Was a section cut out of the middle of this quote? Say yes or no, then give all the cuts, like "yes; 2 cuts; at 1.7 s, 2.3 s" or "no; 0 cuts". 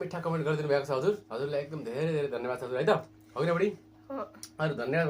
yes; 1 cut; at 1.3 s